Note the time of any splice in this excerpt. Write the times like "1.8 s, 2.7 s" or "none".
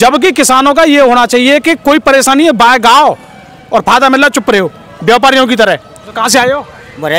6.2 s